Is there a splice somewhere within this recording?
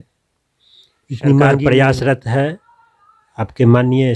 yes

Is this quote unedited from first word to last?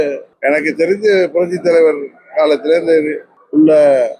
yes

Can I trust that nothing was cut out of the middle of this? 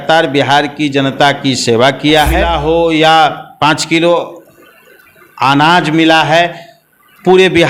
no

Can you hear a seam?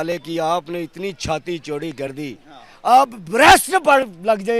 no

